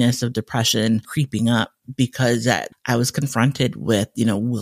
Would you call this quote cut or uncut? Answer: cut